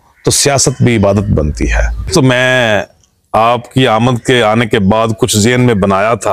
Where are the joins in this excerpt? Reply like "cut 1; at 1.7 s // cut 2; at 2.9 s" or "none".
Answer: cut 1; at 2.1 s